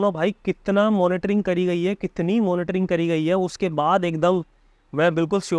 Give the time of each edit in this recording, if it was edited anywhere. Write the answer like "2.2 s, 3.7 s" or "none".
none